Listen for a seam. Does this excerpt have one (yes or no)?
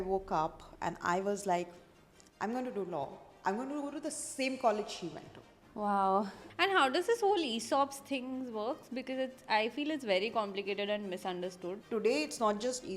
yes